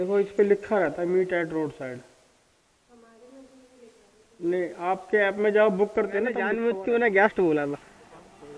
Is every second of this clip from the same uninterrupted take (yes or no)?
no